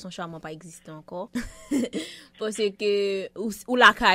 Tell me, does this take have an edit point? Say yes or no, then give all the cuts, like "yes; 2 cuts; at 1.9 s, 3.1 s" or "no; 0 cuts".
yes; 1 cut; at 1.3 s